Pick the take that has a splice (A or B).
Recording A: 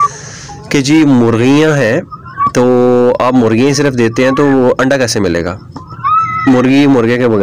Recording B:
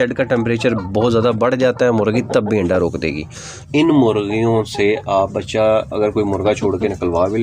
B